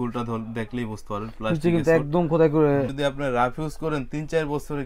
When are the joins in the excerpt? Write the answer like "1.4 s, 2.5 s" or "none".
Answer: 2.9 s